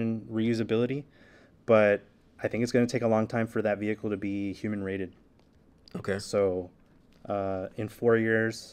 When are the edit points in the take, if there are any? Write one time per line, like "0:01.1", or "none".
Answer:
none